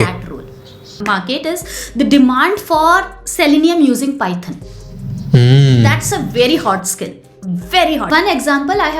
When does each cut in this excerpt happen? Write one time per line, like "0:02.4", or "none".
0:01.0
0:08.0